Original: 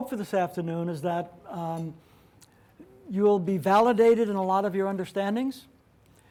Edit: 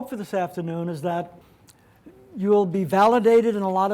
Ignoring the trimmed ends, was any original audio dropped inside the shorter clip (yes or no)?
yes